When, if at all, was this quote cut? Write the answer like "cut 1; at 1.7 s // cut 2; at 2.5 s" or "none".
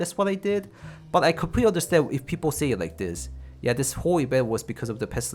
none